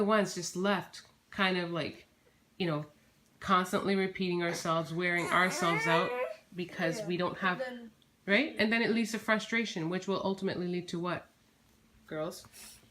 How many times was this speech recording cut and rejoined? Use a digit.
0